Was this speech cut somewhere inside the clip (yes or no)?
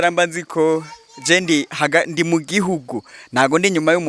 no